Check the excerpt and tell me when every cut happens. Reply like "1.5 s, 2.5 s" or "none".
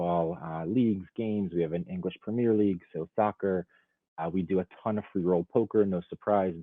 none